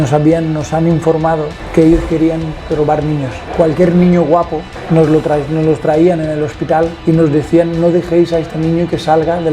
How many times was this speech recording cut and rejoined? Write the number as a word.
one